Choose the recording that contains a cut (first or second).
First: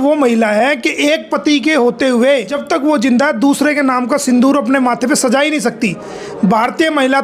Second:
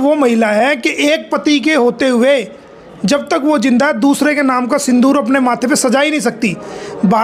first